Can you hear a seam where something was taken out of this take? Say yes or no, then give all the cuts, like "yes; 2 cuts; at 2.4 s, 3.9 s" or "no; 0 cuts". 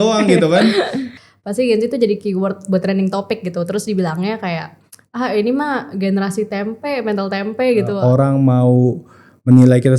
yes; 2 cuts; at 1.1 s, 8.0 s